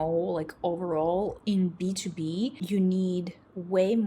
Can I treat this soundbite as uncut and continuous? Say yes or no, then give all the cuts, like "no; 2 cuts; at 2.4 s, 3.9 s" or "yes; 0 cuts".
no; 2 cuts; at 1.4 s, 2.6 s